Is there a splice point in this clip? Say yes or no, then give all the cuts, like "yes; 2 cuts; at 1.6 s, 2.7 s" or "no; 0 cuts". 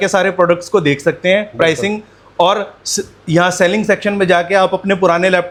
no; 0 cuts